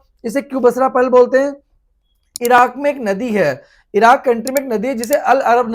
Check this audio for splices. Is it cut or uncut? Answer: uncut